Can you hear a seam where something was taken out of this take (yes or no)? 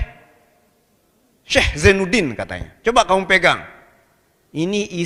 no